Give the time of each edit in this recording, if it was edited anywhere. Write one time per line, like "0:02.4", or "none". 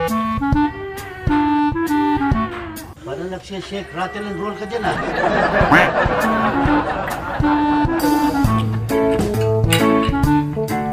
none